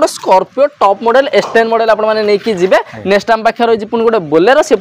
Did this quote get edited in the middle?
no; 0 cuts

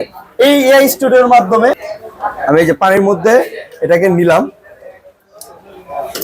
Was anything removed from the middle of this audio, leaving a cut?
yes; 1 cut; at 1.9 s

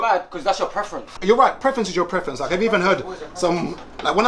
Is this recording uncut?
no; 1 cut; at 1.1 s

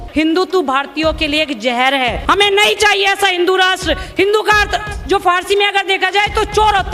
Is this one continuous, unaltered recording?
no; 1 cut; at 2.2 s

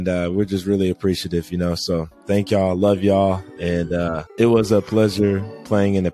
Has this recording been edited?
no; 0 cuts

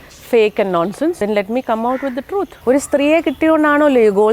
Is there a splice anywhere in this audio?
yes; 2 cuts; at 1.2 s, 2.5 s

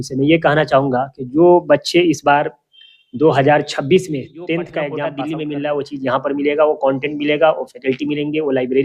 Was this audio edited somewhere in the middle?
yes; 1 cut; at 5.1 s

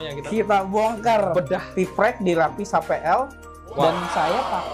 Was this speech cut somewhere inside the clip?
yes; 1 cut; at 1.7 s

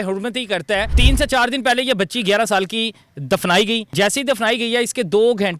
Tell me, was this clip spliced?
yes; 2 cuts; at 0.9 s, 3.9 s

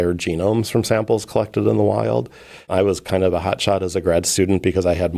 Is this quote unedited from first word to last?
yes; 0 cuts

